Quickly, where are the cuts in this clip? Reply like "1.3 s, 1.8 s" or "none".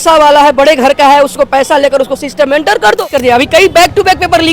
3.0 s